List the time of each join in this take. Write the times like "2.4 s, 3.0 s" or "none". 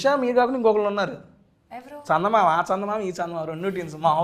none